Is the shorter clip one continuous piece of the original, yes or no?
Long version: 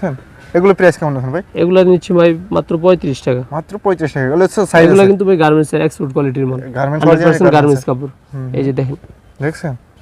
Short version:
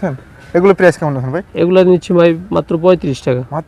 yes